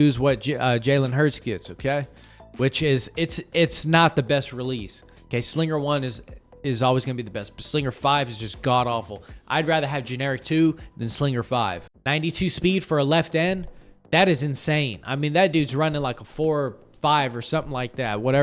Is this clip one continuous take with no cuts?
no; 1 cut; at 11.9 s

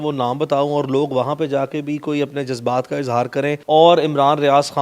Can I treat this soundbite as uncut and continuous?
no; 1 cut; at 3.6 s

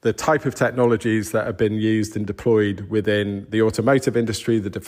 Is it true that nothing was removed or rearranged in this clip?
yes; 0 cuts

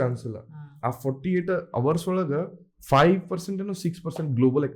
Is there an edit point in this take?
yes; 1 cut; at 2.7 s

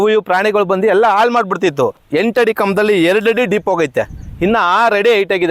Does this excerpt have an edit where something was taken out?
yes; 1 cut; at 2.0 s

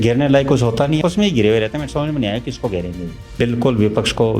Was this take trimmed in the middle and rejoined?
yes; 2 cuts; at 1.0 s, 3.3 s

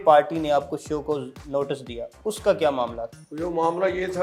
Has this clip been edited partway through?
no; 0 cuts

